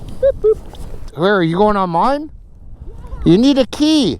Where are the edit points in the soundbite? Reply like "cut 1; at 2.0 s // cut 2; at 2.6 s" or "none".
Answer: cut 1; at 1.0 s